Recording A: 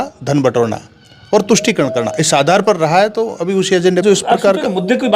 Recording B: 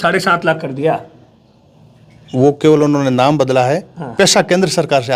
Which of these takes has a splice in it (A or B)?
A